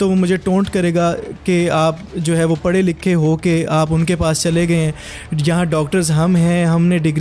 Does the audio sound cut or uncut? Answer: uncut